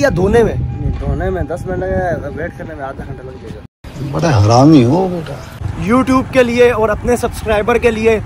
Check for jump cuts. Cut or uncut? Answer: cut